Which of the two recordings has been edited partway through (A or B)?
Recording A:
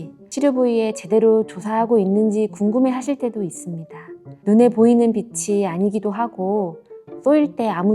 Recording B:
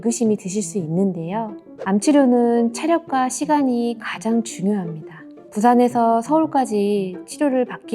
B